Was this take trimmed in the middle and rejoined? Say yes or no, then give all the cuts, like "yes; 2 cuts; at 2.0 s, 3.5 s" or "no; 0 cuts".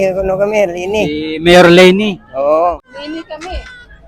yes; 1 cut; at 2.8 s